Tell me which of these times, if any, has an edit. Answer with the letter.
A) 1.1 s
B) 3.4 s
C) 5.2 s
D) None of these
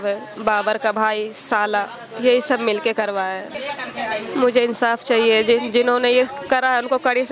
B